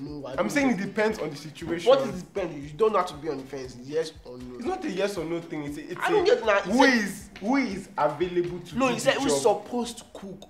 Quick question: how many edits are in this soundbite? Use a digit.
0